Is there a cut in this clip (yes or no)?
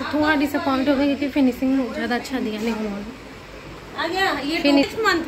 no